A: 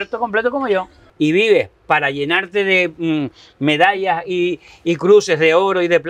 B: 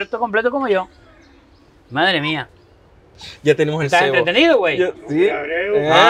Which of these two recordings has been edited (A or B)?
A